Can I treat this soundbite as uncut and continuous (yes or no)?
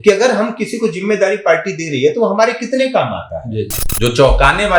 no